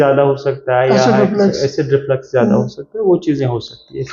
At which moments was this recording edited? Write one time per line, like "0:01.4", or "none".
none